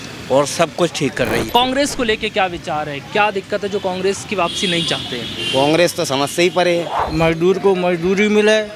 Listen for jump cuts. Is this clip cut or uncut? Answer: cut